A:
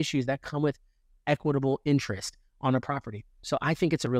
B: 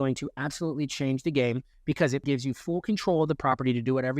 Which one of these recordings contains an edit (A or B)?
B